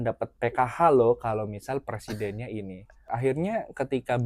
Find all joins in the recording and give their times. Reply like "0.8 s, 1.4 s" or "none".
2.9 s